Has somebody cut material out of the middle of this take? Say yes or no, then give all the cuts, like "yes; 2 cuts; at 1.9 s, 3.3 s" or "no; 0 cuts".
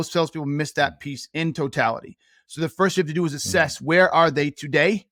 no; 0 cuts